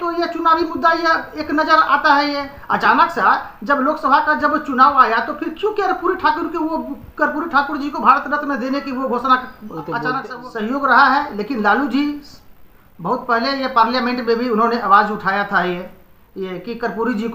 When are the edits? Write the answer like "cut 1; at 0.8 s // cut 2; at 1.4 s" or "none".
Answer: cut 1; at 10.2 s